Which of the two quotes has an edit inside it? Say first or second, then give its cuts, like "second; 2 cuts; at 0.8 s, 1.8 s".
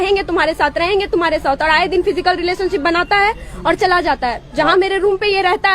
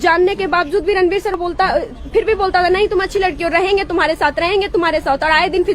second; 1 cut; at 1.3 s